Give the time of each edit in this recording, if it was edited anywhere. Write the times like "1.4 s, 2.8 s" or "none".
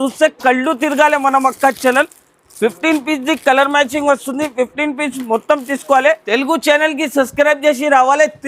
6.2 s